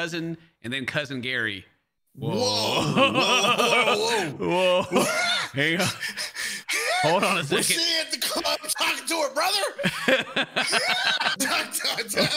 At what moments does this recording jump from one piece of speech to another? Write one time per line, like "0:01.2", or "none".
0:11.3